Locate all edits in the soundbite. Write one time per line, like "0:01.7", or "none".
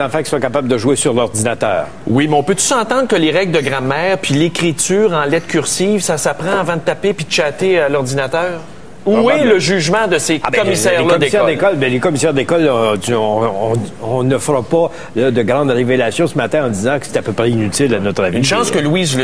0:13.9